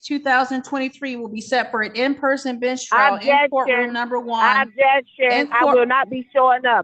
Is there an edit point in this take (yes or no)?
no